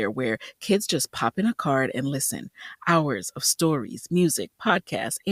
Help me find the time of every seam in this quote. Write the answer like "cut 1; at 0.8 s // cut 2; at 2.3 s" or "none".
none